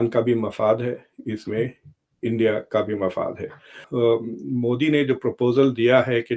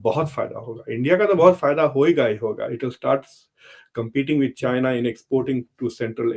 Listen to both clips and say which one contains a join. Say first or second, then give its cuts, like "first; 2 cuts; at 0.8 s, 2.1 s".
first; 1 cut; at 3.8 s